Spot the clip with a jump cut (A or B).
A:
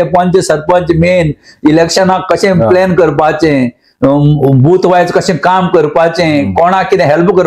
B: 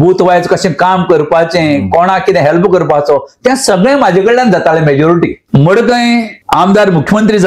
B